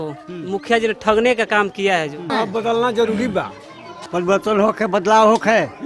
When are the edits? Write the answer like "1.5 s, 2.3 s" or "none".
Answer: 2.3 s, 4.0 s